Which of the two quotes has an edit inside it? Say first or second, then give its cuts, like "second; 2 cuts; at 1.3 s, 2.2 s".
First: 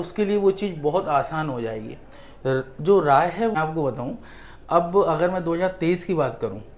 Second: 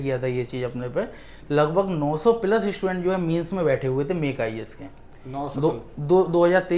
first; 1 cut; at 3.5 s